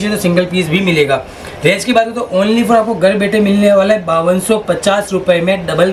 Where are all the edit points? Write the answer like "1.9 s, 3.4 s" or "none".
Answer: none